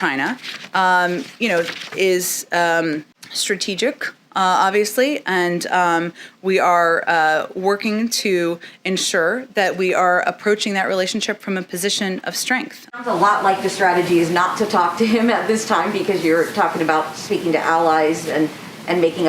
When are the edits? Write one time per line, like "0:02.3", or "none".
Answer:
0:12.9